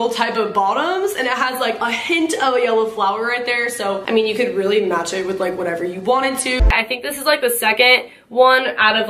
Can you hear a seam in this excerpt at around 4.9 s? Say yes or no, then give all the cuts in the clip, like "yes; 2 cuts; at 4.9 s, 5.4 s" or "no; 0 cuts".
no; 1 cut; at 6.7 s